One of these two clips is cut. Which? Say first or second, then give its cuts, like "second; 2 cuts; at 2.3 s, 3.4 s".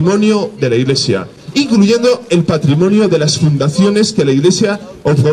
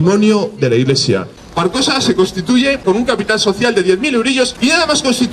second; 3 cuts; at 1.4 s, 2.8 s, 4.5 s